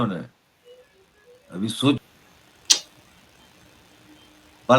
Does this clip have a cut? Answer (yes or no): yes